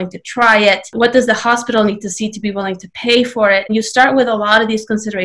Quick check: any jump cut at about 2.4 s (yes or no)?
no